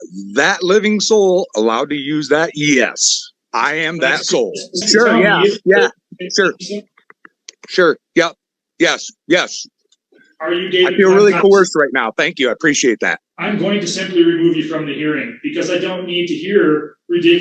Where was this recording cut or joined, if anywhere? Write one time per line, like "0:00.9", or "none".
0:04.8
0:13.2